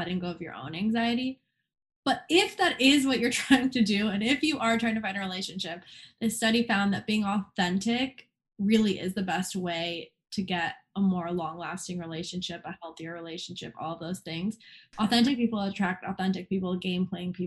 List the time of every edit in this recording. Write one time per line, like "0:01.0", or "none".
0:14.7